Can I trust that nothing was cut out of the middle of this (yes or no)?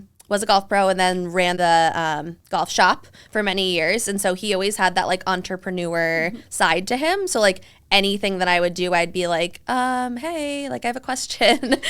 no